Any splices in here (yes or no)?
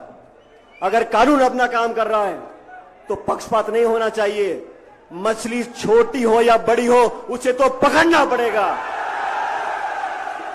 no